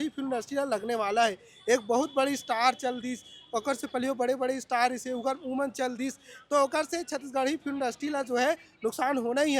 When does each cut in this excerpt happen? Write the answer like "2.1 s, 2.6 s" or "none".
none